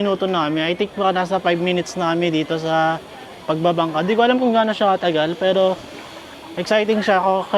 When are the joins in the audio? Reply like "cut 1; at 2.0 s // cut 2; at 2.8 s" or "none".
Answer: none

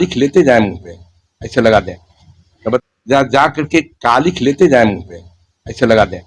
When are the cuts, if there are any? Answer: cut 1; at 2.8 s

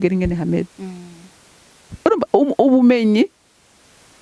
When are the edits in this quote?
none

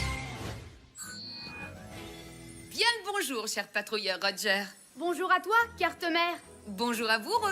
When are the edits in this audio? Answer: cut 1; at 2.7 s

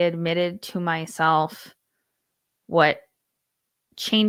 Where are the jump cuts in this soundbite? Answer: none

